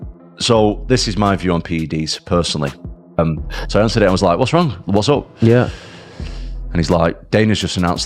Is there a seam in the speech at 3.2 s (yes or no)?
yes